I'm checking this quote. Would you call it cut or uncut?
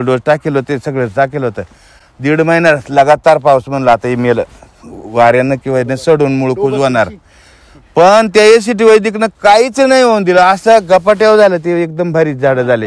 uncut